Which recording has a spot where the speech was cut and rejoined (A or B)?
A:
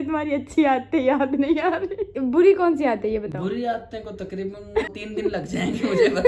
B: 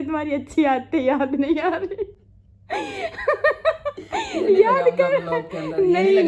A